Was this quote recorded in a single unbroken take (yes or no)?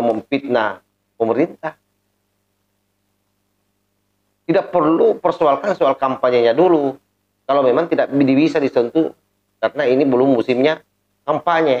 yes